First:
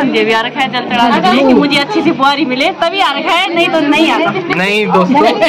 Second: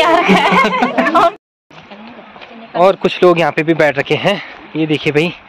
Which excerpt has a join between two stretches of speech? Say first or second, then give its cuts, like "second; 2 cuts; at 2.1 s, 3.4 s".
second; 1 cut; at 1.4 s